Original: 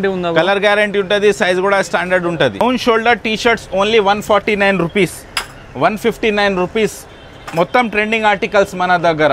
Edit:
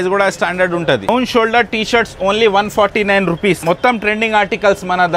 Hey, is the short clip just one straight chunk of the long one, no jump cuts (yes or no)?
no